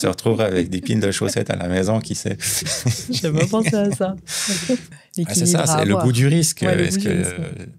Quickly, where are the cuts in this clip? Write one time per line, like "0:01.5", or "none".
0:04.9